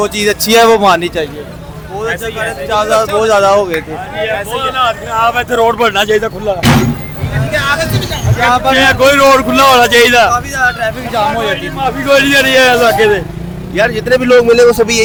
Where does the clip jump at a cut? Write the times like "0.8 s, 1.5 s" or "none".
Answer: none